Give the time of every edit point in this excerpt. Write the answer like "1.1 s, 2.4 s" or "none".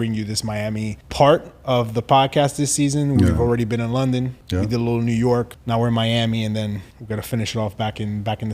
1.0 s, 4.4 s, 5.6 s, 6.9 s